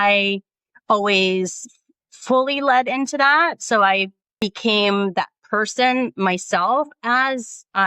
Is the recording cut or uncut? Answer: cut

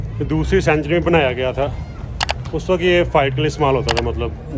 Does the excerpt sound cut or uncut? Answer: uncut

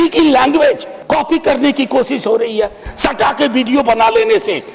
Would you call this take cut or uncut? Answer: cut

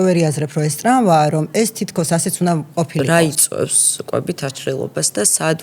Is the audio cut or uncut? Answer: cut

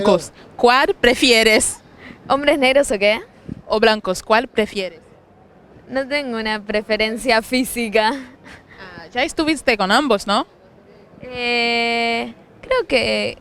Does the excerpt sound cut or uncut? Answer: uncut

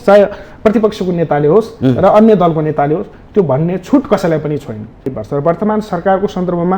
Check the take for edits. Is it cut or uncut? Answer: cut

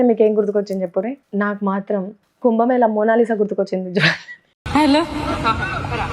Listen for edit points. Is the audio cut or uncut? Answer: cut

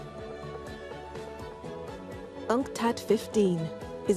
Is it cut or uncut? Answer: cut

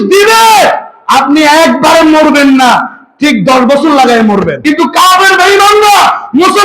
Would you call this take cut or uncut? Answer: cut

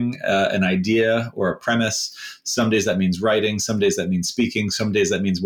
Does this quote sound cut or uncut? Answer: uncut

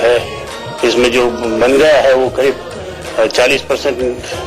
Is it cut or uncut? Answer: uncut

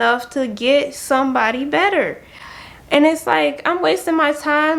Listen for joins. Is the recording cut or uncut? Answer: uncut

